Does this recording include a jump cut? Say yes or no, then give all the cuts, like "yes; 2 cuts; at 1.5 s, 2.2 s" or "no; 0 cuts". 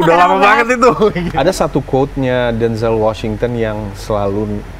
yes; 1 cut; at 1.2 s